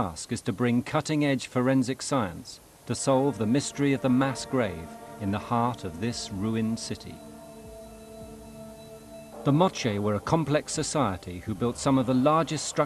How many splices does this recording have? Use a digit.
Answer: 1